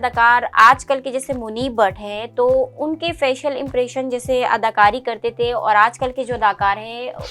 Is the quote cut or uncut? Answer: uncut